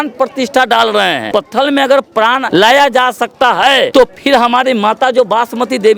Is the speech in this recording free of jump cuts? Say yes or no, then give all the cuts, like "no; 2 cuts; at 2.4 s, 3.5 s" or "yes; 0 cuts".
no; 3 cuts; at 1.2 s, 2.4 s, 3.9 s